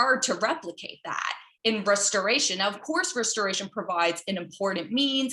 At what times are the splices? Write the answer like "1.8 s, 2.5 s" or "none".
none